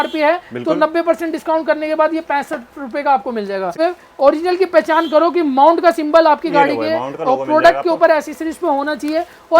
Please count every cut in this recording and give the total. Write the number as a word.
one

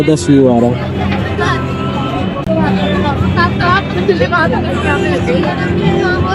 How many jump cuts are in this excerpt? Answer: zero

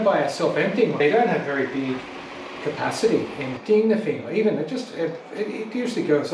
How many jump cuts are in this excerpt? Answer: two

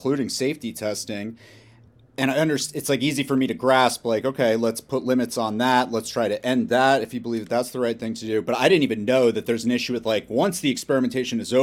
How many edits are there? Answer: zero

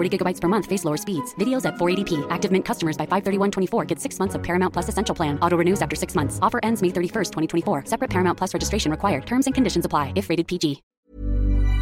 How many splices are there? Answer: one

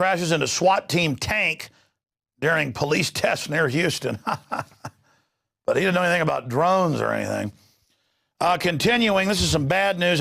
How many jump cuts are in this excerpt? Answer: one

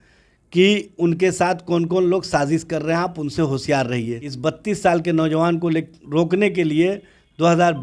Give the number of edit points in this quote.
one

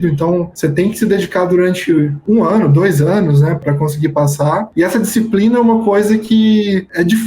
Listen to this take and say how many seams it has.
one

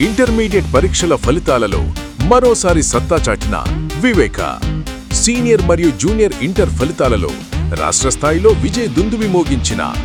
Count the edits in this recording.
zero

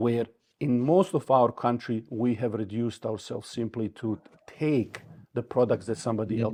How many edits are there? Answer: zero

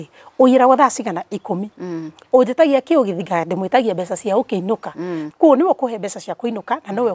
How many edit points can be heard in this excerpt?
one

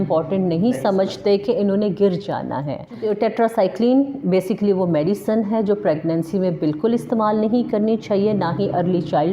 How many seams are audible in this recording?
one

